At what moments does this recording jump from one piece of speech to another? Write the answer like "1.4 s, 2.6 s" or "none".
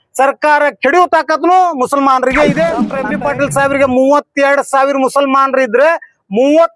3.0 s